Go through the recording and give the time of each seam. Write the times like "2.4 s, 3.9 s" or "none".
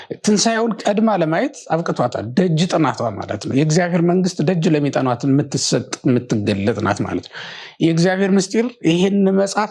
none